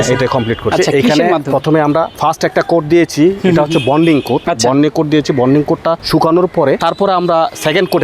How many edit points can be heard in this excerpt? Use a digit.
4